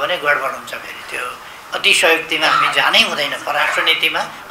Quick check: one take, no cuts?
yes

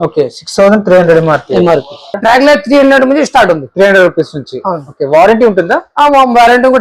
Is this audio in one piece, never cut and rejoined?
no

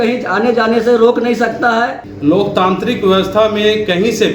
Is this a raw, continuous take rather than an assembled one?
no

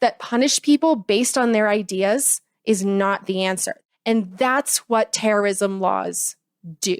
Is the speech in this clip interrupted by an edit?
yes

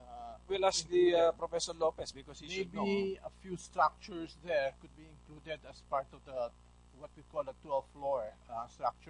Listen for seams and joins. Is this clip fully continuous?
no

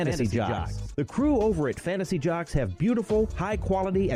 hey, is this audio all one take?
yes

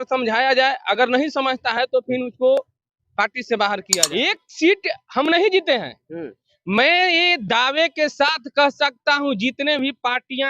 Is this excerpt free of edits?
no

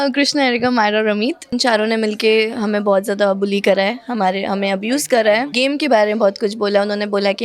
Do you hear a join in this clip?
yes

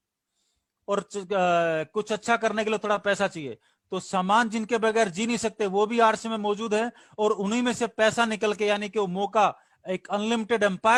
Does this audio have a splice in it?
no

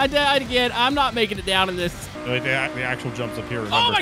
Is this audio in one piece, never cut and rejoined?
no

